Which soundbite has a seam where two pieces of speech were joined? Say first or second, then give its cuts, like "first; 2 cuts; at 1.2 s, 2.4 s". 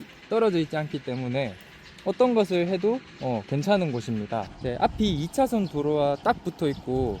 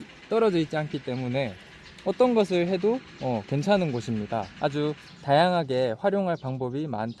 first; 1 cut; at 4.5 s